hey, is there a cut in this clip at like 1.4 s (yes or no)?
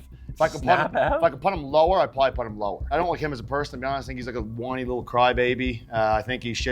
no